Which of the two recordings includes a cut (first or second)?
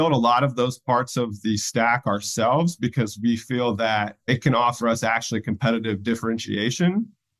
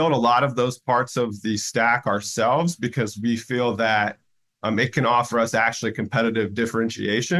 first